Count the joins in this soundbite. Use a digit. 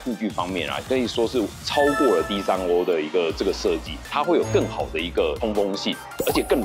1